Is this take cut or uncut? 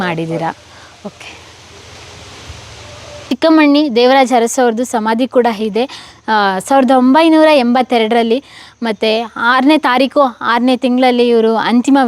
cut